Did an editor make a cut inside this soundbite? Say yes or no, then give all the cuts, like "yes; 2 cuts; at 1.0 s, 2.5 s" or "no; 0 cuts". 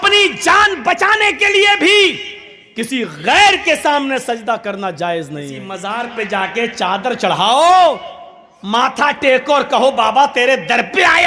yes; 1 cut; at 5.7 s